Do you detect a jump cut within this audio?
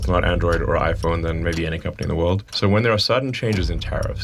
yes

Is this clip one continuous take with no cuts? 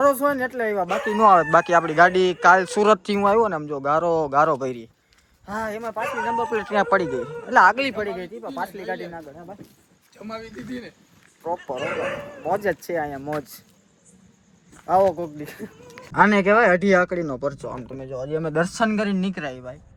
yes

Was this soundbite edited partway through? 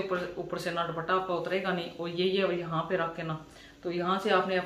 no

